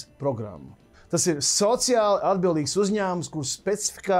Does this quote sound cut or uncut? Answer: uncut